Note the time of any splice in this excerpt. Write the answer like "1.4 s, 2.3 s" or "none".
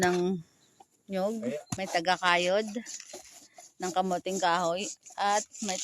1.7 s